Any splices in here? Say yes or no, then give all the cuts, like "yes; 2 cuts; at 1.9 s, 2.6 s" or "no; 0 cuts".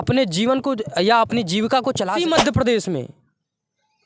yes; 1 cut; at 2.1 s